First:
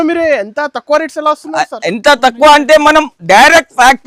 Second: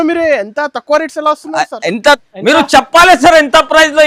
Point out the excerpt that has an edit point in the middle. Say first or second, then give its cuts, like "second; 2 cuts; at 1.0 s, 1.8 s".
second; 1 cut; at 2.2 s